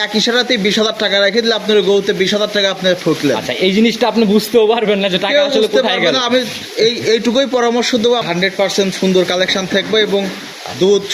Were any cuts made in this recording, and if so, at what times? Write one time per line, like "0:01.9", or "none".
0:08.2